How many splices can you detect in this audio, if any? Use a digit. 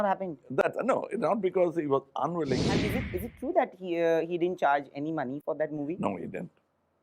1